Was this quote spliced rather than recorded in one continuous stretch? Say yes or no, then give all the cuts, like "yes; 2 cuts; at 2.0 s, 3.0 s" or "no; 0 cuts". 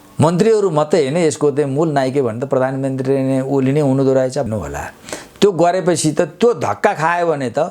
no; 0 cuts